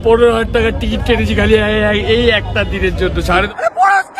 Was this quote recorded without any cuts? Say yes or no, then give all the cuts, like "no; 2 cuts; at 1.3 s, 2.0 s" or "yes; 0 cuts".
no; 1 cut; at 3.0 s